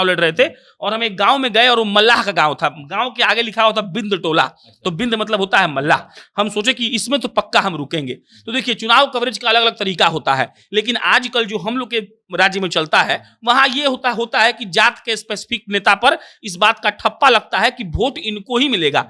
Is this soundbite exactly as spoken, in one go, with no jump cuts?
yes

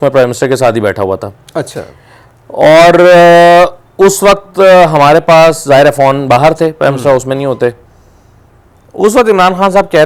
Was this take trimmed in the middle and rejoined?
no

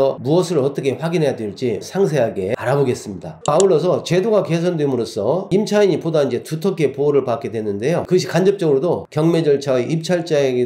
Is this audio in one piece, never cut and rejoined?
yes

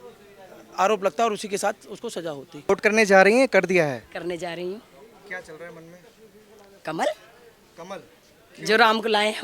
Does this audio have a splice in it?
yes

